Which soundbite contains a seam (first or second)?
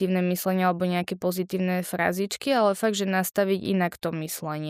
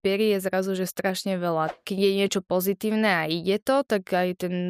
second